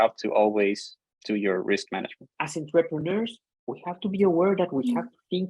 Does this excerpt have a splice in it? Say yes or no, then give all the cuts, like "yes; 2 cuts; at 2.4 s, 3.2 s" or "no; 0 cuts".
yes; 1 cut; at 2.3 s